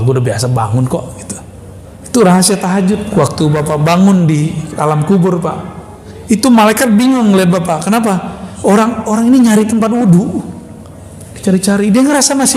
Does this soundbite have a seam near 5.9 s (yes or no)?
no